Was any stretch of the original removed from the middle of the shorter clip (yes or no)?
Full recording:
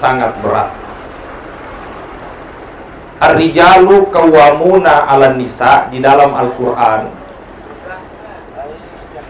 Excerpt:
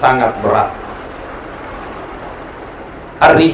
no